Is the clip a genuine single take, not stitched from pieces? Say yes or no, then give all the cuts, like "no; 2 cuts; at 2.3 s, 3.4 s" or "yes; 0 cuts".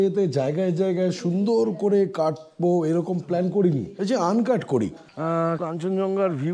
no; 2 cuts; at 3.9 s, 5.3 s